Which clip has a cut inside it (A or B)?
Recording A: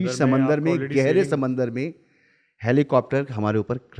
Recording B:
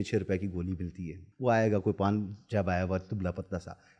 B